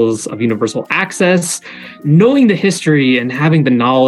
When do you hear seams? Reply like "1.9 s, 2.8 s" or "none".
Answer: 2.0 s